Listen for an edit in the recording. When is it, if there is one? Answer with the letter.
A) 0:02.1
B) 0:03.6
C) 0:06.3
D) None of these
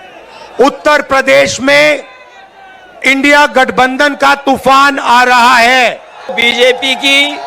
C